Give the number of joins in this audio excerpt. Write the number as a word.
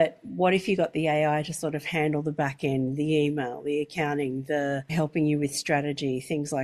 one